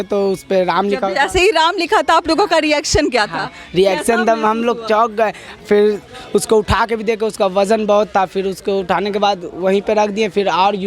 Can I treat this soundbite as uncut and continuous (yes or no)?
yes